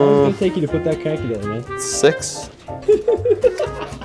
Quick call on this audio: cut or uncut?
cut